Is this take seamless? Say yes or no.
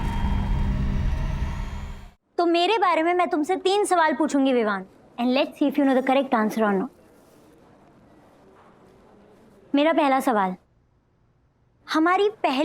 no